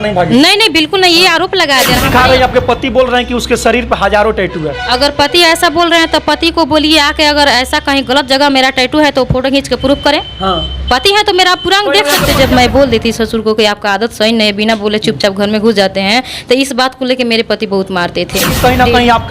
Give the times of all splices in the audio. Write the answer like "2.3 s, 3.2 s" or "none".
2.0 s, 12.3 s, 18.6 s